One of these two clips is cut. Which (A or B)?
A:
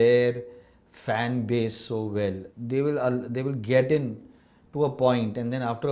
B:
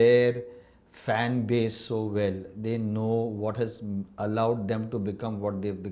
A